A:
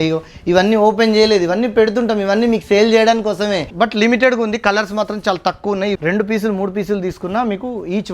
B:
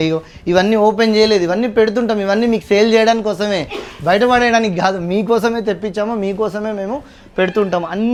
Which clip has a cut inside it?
A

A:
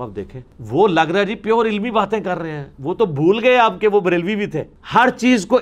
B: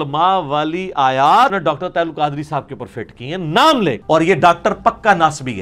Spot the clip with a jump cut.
B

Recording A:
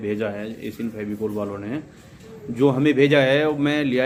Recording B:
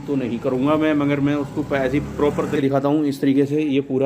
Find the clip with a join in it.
B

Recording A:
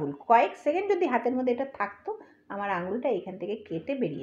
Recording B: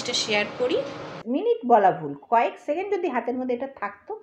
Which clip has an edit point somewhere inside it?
B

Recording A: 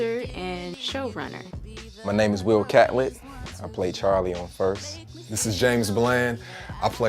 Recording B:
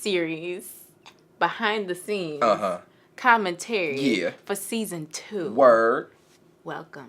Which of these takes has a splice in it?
A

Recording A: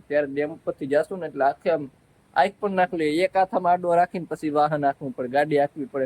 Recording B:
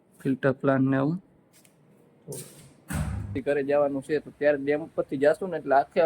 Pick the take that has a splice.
B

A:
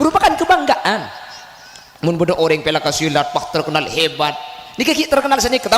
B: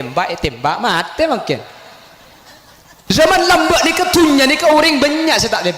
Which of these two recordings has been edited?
B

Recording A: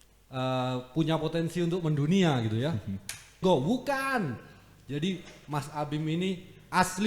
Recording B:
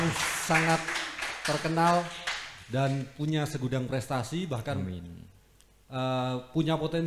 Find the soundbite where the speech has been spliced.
A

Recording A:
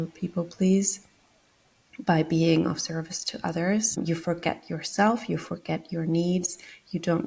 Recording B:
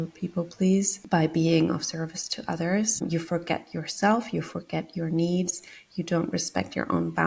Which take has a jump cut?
B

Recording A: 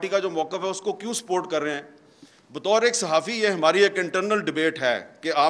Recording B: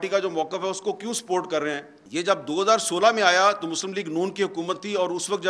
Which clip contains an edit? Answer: B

